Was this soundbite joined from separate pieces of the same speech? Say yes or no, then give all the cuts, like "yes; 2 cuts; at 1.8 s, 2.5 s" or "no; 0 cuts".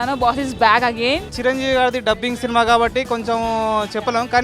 yes; 1 cut; at 1.3 s